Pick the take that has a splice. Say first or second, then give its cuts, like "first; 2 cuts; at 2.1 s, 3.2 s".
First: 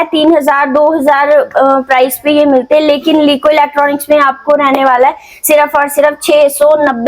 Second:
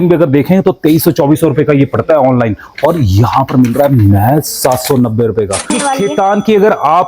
second; 1 cut; at 5.8 s